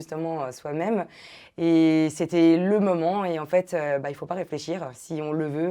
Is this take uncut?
yes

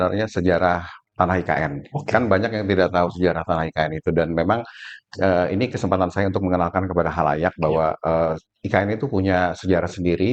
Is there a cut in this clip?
no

